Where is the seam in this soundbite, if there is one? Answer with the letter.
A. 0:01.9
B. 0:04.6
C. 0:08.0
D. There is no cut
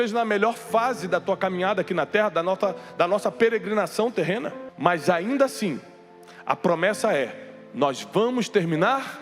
B